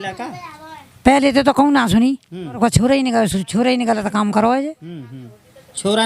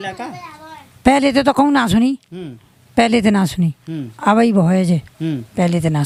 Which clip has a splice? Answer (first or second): first